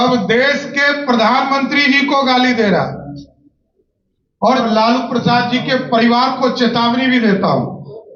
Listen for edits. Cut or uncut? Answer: cut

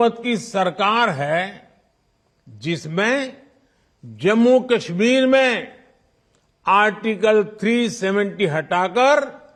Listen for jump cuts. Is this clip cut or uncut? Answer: uncut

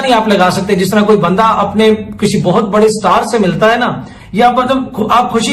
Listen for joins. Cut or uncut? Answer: cut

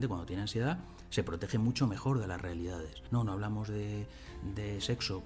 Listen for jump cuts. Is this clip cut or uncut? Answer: cut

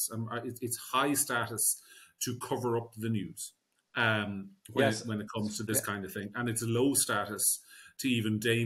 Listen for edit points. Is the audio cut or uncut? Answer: uncut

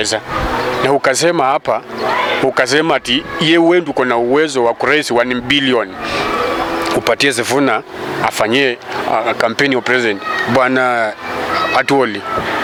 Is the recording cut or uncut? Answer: uncut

